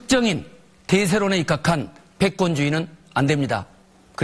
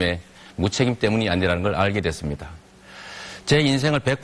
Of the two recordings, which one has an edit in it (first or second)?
first